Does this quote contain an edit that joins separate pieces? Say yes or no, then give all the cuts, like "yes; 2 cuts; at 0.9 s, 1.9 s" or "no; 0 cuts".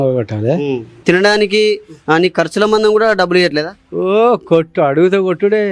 yes; 1 cut; at 1.0 s